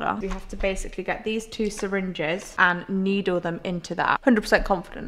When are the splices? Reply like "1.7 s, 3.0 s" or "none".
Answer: 4.2 s